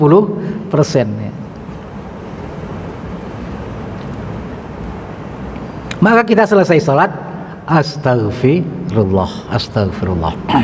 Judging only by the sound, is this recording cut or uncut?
uncut